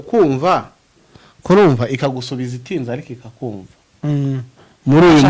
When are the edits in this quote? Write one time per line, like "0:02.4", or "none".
0:03.9